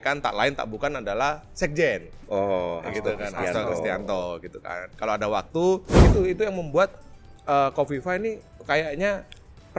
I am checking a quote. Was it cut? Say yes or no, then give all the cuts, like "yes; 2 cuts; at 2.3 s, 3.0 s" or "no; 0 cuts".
yes; 1 cut; at 6.0 s